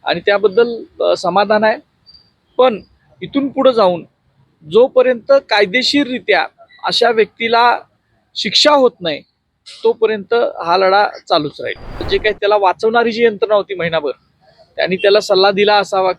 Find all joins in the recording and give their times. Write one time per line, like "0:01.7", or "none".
0:12.0